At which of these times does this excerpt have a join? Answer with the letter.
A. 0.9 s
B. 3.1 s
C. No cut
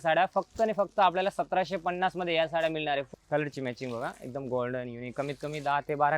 B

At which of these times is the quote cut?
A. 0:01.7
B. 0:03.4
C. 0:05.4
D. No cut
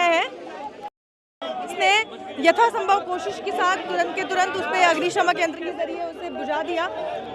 A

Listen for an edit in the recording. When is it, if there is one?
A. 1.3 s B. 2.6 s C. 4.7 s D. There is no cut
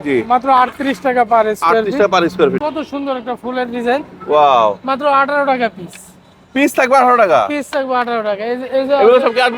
B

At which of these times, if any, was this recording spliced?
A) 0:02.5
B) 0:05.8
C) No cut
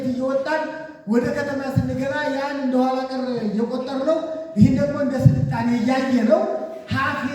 C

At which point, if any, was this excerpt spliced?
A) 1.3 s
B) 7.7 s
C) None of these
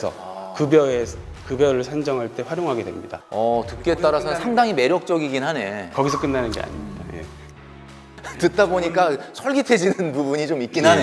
B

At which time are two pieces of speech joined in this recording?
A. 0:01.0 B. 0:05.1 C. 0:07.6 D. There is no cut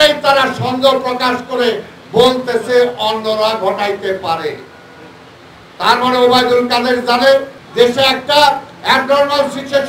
C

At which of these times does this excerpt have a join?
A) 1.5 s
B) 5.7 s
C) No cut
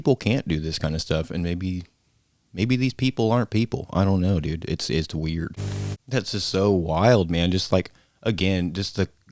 B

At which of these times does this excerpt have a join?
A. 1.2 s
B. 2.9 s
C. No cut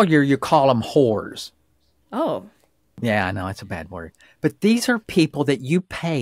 B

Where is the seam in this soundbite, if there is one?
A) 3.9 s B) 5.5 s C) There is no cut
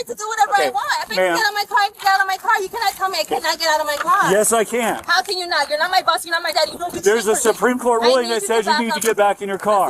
C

